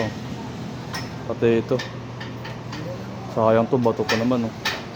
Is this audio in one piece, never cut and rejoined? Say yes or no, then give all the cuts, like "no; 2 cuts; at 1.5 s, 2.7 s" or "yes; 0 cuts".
yes; 0 cuts